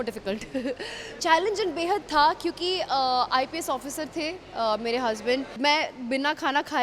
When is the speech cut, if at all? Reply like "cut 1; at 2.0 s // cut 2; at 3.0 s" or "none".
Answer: cut 1; at 1.0 s // cut 2; at 5.5 s

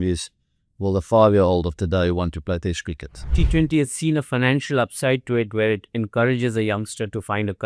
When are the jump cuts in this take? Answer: cut 1; at 3.2 s

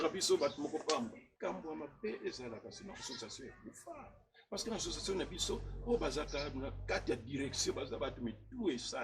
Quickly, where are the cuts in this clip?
cut 1; at 1.3 s

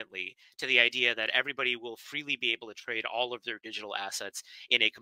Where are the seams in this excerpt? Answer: none

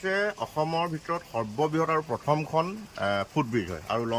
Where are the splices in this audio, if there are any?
none

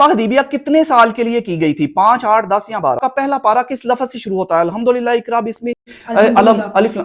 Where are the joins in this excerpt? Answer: cut 1; at 3.0 s

